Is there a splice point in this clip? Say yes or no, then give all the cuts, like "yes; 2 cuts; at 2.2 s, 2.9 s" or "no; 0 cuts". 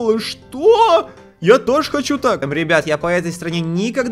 yes; 1 cut; at 2.5 s